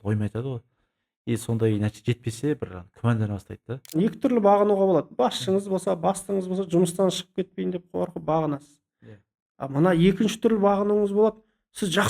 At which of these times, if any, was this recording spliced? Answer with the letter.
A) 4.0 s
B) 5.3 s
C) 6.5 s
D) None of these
A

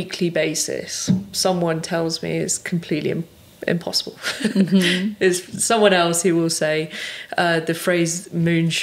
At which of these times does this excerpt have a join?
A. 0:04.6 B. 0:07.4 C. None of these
C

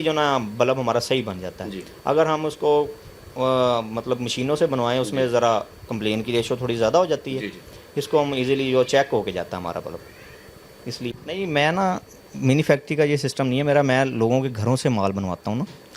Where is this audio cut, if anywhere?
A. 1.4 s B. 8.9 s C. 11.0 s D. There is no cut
C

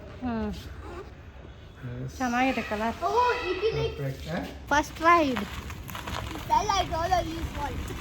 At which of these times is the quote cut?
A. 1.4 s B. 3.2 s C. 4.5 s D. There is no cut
C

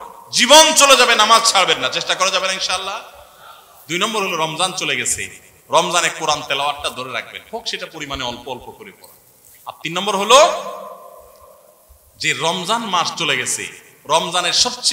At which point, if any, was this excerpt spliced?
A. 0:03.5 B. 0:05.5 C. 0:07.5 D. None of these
D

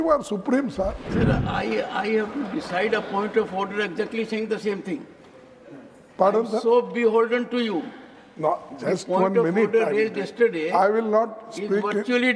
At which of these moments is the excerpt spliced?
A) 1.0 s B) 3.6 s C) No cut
A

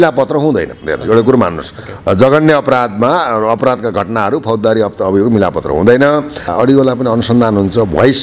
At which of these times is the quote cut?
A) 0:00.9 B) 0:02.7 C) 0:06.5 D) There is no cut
C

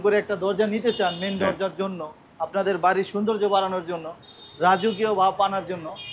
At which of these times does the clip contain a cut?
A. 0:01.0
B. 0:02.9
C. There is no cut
C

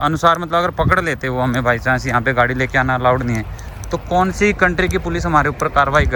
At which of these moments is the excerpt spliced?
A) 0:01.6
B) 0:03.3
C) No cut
C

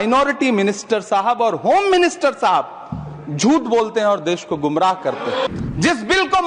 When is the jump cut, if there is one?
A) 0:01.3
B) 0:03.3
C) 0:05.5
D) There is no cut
C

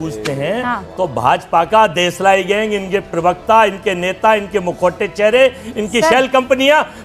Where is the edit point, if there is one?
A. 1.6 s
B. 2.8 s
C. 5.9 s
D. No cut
D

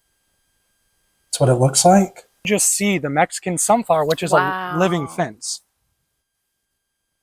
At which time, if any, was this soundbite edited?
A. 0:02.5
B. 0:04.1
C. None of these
A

